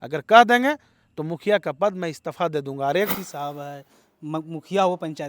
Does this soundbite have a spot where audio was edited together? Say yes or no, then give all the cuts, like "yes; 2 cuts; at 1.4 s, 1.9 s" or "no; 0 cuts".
yes; 1 cut; at 3.1 s